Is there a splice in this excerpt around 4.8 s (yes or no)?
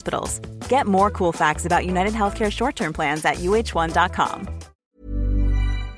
yes